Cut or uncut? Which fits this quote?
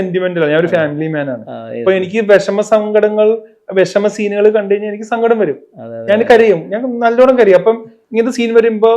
uncut